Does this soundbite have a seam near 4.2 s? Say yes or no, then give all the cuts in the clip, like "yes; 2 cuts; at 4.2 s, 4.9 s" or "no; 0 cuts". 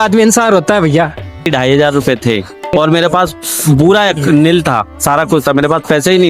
no; 2 cuts; at 1.5 s, 2.7 s